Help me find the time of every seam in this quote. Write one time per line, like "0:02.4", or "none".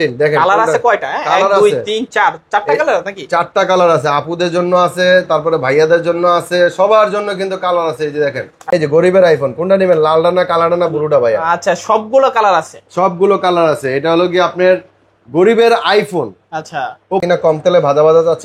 0:08.7
0:17.2